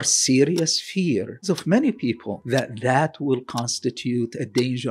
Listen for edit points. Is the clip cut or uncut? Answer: cut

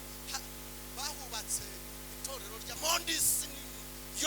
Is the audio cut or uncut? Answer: cut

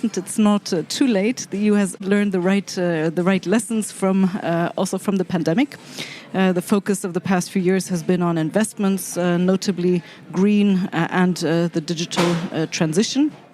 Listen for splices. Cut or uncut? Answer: uncut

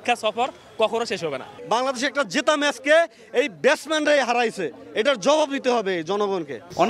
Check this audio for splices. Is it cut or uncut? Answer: uncut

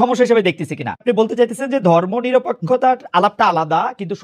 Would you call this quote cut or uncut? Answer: cut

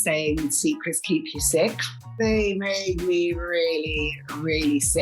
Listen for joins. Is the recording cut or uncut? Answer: cut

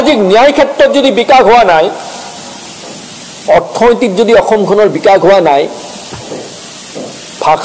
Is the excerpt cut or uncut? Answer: uncut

